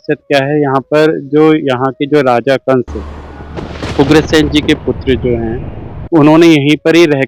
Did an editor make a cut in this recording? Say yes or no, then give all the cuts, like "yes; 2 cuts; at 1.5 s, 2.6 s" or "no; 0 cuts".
no; 0 cuts